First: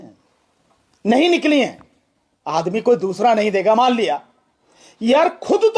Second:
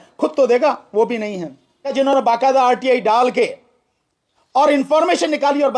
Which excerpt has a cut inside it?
second; 1 cut; at 2.1 s

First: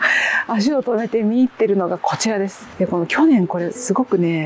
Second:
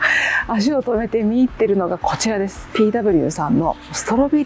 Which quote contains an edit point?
first; 1 cut; at 2.7 s

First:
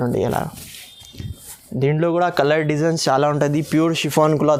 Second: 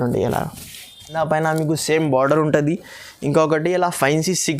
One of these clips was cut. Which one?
second; 1 cut; at 1.1 s

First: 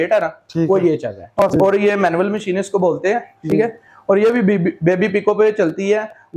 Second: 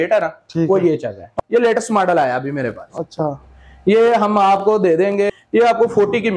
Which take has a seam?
second; 2 cuts; at 1.3 s, 5.3 s

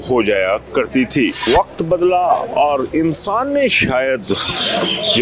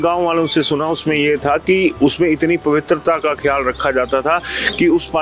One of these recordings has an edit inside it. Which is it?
first; 1 cut; at 1.4 s

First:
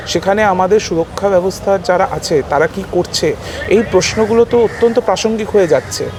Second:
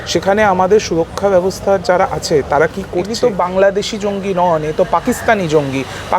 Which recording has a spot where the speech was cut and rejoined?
second; 1 cut; at 3.0 s

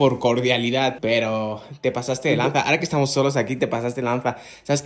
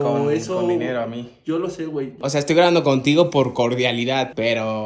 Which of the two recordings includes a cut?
second; 1 cut; at 2.2 s

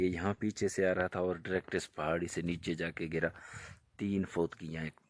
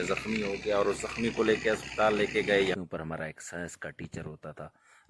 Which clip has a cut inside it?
second; 1 cut; at 2.7 s

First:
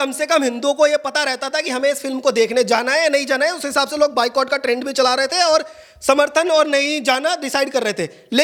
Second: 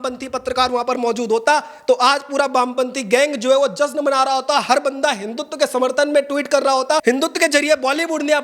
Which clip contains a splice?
second; 1 cut; at 7.0 s

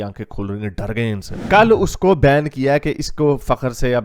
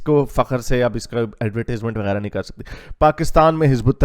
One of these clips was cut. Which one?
first; 1 cut; at 1.4 s

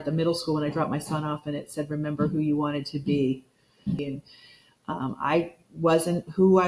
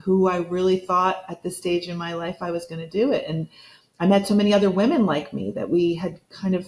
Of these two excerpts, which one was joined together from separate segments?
first; 1 cut; at 4.0 s

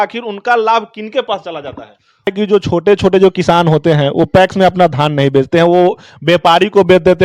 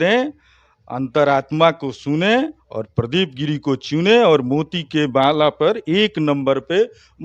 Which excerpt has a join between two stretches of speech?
first; 1 cut; at 2.3 s

